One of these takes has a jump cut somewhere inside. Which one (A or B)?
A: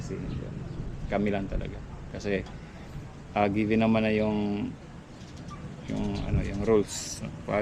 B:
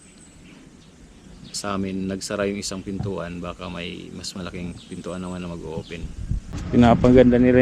B